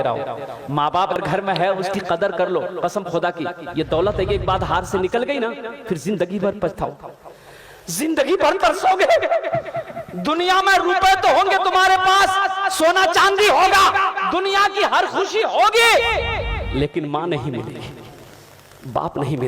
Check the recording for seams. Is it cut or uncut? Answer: cut